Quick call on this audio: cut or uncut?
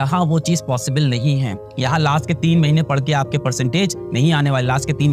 uncut